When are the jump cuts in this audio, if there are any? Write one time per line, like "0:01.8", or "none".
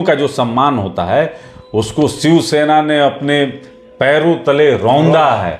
none